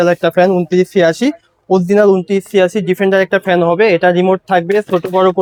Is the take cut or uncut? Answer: uncut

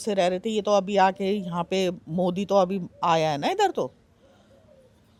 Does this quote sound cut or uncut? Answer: uncut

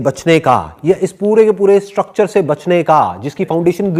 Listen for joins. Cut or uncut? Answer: uncut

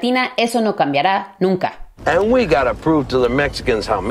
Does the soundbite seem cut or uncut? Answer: cut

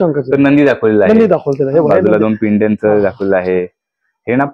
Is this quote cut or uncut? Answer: uncut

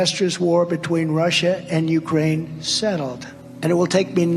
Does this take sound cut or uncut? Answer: uncut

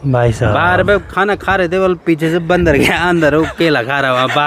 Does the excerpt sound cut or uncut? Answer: uncut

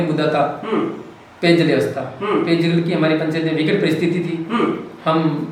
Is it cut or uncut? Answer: uncut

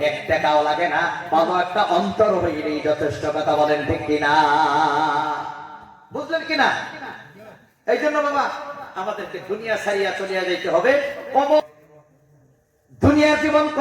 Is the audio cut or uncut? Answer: cut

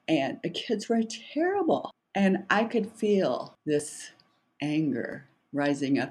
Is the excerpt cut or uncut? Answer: cut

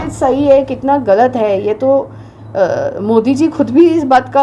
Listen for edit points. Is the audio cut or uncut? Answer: uncut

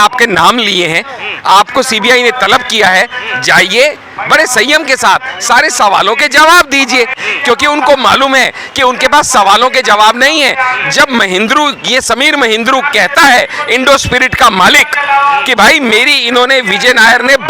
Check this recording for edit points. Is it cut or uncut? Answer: cut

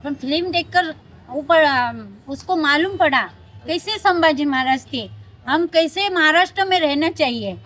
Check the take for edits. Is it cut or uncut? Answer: uncut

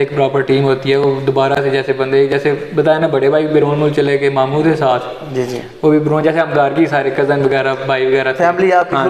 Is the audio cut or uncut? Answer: uncut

